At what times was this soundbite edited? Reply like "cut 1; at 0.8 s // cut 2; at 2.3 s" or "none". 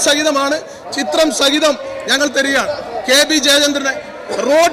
none